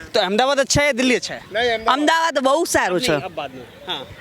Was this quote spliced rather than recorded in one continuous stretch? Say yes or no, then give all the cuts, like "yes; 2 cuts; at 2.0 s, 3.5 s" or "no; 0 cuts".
no; 0 cuts